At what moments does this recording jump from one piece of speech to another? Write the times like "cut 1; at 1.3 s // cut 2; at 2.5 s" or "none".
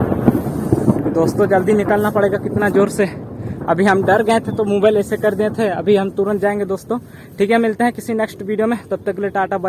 none